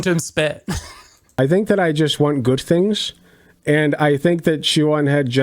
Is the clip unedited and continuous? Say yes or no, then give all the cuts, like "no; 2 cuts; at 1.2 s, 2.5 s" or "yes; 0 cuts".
no; 1 cut; at 1.4 s